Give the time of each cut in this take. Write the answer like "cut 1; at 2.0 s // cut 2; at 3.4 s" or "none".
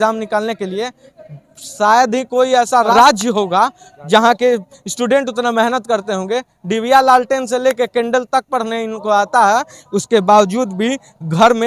cut 1; at 2.9 s